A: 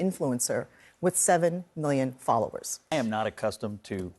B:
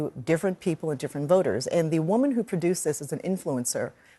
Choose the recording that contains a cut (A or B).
A